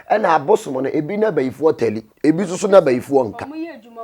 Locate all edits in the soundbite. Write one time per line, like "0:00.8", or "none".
0:02.1